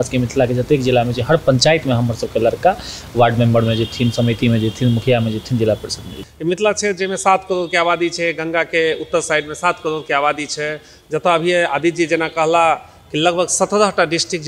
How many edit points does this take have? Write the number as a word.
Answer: one